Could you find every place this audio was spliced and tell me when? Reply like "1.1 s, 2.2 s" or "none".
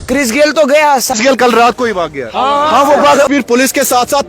1.1 s, 3.3 s